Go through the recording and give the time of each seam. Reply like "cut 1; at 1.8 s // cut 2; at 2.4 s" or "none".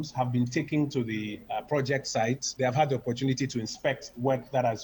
cut 1; at 1.4 s // cut 2; at 2.5 s